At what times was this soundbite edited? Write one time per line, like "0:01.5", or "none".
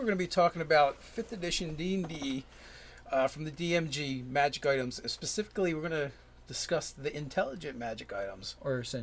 0:07.7